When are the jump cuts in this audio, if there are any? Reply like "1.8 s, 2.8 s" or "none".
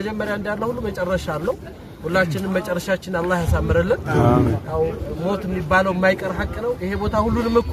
none